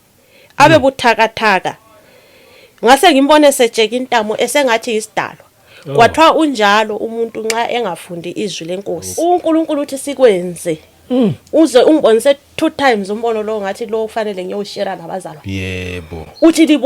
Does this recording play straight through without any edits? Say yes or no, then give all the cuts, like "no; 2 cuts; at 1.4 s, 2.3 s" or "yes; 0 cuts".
no; 1 cut; at 9.1 s